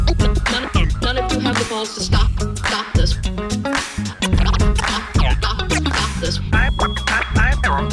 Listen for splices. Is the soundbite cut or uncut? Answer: uncut